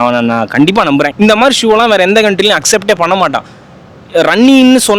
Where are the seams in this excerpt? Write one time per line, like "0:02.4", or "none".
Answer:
0:01.1